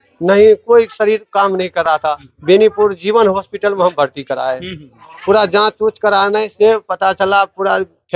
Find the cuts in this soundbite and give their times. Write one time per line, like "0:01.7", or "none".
0:02.0